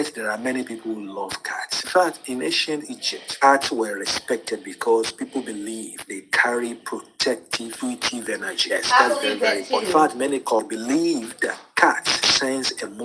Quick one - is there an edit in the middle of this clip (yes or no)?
yes